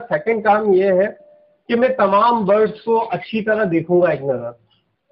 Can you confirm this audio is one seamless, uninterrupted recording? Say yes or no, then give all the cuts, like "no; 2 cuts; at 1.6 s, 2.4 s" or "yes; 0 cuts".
yes; 0 cuts